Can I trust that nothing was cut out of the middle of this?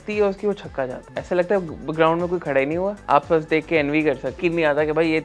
no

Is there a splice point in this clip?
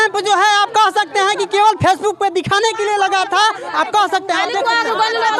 no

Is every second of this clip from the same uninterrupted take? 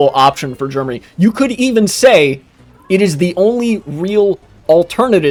yes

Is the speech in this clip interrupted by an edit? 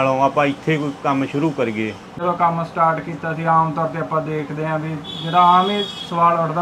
yes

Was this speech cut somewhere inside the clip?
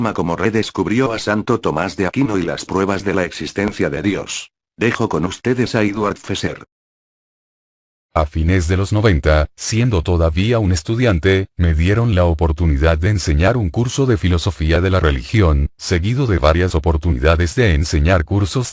no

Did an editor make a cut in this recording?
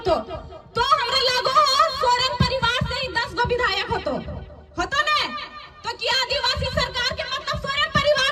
no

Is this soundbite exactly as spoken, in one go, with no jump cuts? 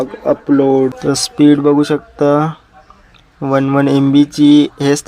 no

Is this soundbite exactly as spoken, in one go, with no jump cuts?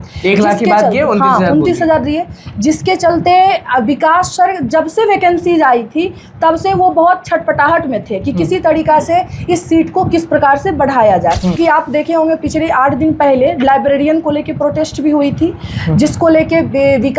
no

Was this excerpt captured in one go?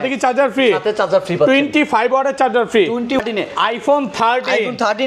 no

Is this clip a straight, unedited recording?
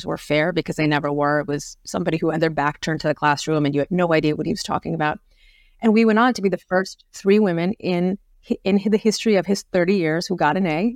yes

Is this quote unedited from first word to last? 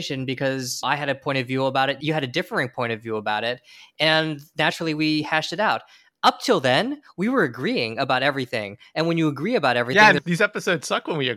no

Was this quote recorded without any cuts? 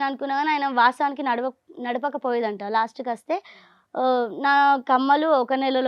yes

